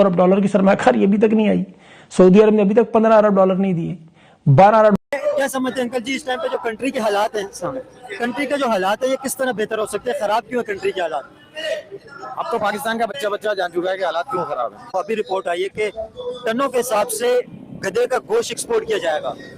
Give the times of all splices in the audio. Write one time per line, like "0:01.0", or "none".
0:05.0